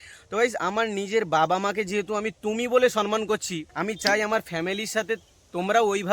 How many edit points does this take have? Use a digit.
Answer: 1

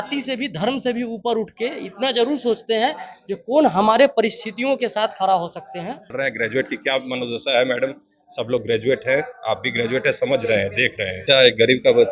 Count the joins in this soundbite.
2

